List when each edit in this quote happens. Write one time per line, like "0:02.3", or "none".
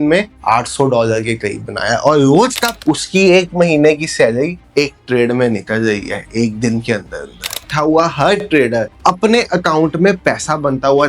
0:02.7
0:07.7